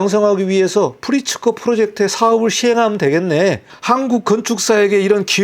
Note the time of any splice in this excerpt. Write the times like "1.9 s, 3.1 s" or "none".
3.7 s